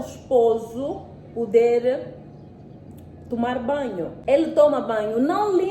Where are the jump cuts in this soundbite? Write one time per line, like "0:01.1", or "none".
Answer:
0:04.1

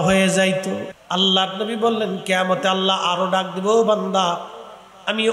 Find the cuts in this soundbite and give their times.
0:00.9

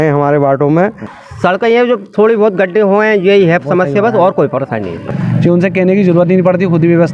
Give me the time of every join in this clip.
0:01.2
0:05.1

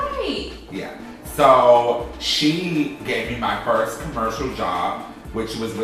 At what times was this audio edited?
0:01.3

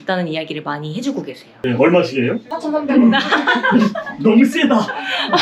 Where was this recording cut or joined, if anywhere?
0:01.6

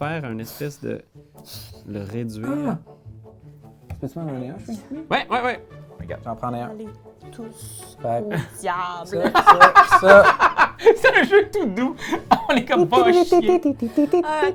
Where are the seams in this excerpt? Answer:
none

